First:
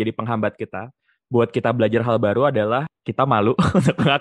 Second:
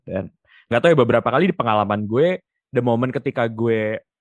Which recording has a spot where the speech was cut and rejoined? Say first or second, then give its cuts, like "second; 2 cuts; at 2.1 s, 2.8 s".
first; 1 cut; at 2.9 s